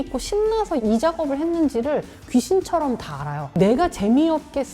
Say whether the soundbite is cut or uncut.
cut